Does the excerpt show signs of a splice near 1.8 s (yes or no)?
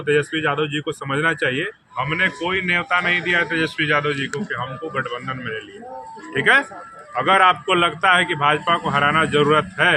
yes